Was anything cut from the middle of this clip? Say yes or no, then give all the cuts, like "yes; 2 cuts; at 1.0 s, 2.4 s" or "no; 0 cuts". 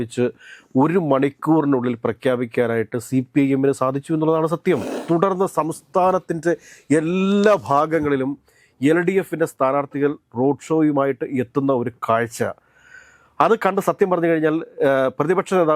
yes; 1 cut; at 4.9 s